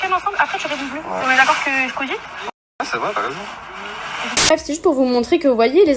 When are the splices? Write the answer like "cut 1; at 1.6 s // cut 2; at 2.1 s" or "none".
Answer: none